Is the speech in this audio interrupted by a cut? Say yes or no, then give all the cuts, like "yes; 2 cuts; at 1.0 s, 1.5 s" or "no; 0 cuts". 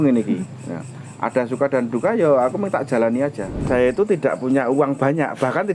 yes; 1 cut; at 3.5 s